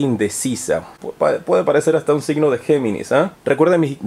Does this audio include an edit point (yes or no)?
no